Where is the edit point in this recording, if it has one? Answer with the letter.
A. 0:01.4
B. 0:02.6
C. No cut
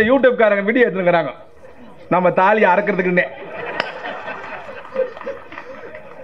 C